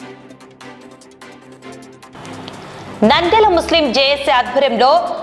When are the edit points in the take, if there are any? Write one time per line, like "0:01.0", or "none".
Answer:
0:01.8